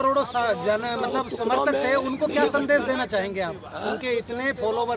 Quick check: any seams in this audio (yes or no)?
no